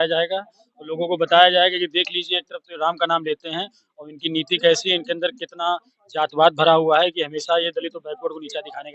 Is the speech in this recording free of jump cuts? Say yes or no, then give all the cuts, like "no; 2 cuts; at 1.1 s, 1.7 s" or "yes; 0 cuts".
yes; 0 cuts